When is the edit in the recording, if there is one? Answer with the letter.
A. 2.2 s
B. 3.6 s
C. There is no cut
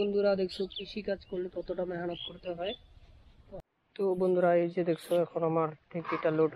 B